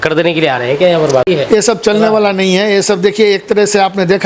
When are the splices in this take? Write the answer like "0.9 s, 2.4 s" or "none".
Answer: 1.2 s